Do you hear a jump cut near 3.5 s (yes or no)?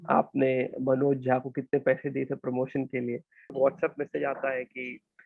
yes